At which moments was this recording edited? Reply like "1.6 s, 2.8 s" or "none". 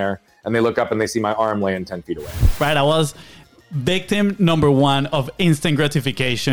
2.5 s